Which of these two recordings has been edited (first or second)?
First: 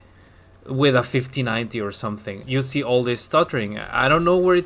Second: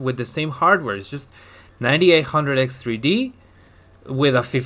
first